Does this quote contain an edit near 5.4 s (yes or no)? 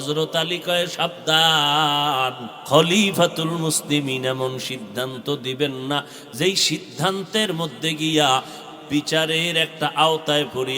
no